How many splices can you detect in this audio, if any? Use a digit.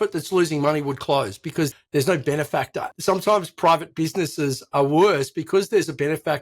2